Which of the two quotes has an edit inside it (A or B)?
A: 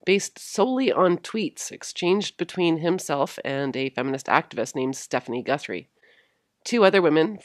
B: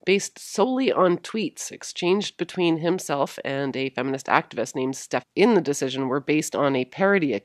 A